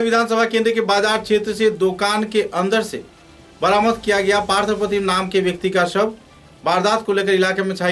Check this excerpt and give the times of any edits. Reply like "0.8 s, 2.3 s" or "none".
none